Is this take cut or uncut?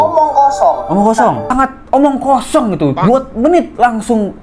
cut